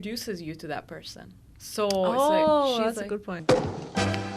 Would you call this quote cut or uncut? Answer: cut